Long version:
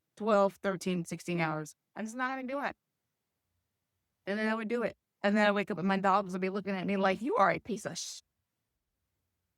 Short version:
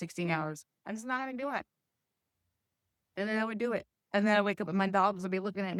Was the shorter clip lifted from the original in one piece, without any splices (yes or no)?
yes